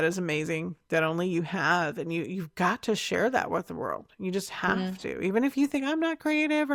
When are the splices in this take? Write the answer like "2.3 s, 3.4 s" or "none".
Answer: none